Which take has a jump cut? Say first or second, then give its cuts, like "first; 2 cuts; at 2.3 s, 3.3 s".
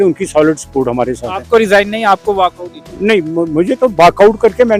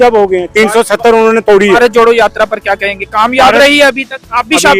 second; 1 cut; at 1.8 s